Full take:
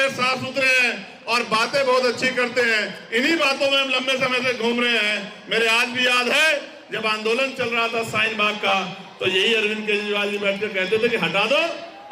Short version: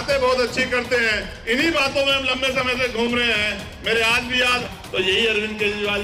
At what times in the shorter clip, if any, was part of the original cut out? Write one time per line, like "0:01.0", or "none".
0:04.6